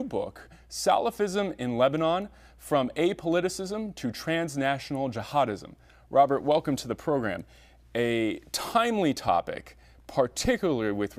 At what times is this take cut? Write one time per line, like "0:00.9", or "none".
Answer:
0:05.9